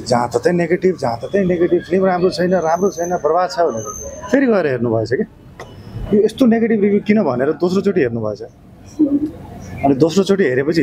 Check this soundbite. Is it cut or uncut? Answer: uncut